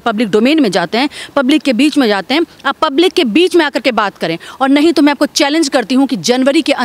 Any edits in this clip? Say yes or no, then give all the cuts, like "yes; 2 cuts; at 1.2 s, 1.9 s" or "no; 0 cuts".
no; 0 cuts